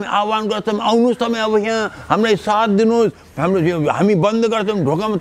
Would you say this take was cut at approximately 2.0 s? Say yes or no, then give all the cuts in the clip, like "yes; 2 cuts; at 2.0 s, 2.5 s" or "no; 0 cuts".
no; 0 cuts